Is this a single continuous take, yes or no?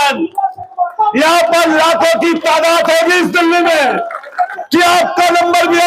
no